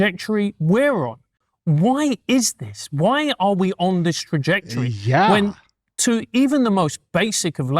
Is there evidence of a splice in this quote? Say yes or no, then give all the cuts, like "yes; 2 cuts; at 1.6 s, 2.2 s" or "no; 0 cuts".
yes; 1 cut; at 1.4 s